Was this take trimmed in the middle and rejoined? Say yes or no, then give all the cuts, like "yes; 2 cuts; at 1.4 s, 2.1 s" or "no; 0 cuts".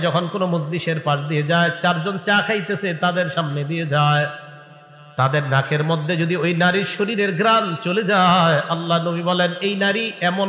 no; 0 cuts